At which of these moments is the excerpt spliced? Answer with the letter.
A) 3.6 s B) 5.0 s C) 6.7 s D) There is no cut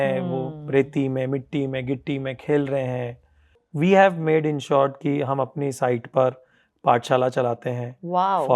A